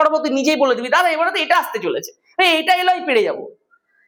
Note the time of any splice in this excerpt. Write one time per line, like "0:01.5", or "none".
none